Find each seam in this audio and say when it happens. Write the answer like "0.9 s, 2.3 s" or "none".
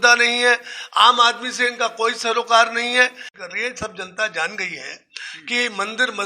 3.4 s